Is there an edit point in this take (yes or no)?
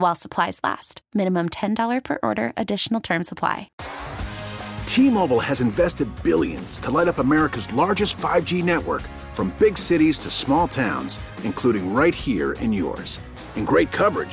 yes